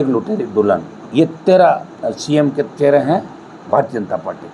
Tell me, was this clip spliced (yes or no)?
no